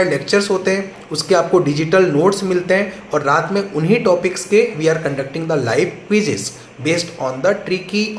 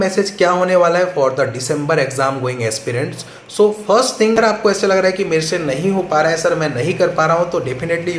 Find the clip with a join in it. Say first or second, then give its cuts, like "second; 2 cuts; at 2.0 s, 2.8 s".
second; 1 cut; at 4.4 s